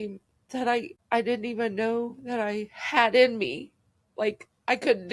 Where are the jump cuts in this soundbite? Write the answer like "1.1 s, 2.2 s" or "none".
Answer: 0.9 s